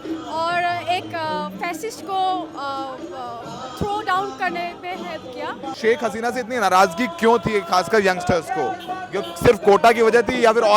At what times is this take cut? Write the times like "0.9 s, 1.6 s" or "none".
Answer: 5.7 s